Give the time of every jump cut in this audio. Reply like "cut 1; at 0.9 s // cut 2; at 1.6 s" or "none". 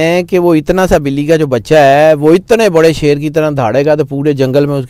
none